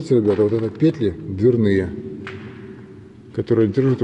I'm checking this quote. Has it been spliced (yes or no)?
no